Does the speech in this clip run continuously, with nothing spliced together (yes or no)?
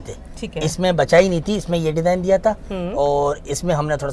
yes